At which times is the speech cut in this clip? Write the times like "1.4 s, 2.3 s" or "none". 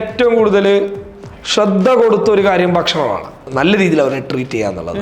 3.3 s